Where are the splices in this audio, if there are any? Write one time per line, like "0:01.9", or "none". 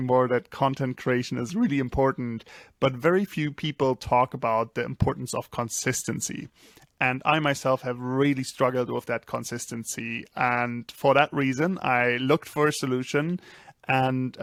none